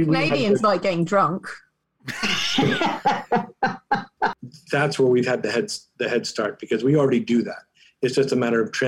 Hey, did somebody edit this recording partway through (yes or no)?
yes